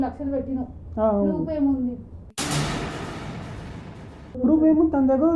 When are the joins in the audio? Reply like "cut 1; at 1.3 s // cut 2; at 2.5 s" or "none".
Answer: none